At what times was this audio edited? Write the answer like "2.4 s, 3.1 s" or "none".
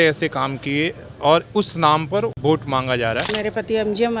2.4 s, 3.3 s

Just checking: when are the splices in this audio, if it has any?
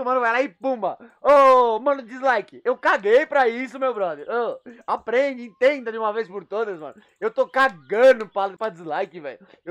8.6 s

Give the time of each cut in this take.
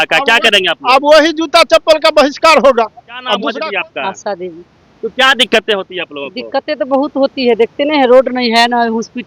3.5 s

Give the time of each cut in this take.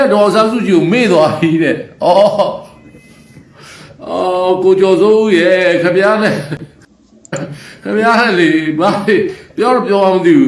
6.8 s

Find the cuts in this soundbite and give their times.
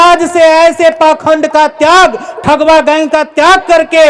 none

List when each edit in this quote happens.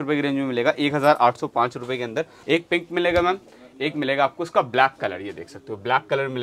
2.4 s

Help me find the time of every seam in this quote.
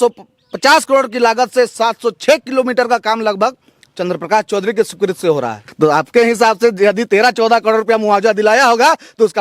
5.6 s

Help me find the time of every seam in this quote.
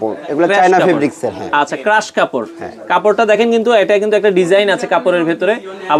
none

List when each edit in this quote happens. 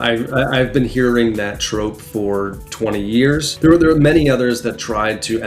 2.6 s, 3.5 s

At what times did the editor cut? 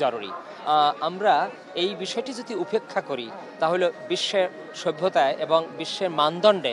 none

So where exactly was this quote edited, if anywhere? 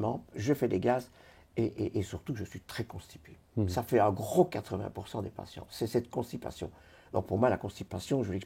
none

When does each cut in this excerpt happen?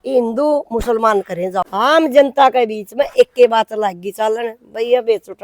1.6 s

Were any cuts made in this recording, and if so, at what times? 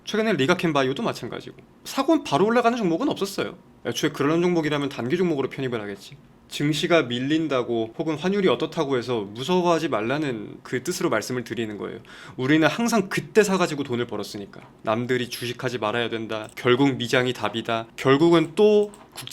7.9 s, 16.5 s, 17.8 s

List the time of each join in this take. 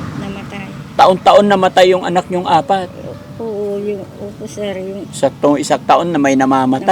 5.1 s

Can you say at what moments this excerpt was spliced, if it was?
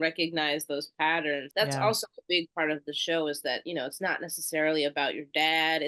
1.5 s

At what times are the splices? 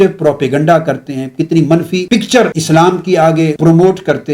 2.3 s, 3.6 s

